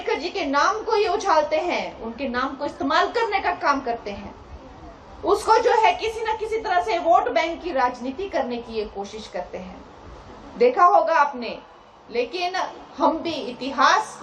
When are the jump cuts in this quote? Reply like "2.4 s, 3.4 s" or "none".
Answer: none